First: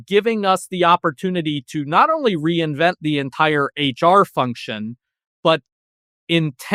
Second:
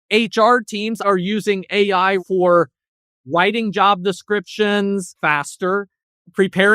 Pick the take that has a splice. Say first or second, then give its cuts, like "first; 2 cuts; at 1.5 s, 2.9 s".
second; 3 cuts; at 1.0 s, 2.2 s, 5.1 s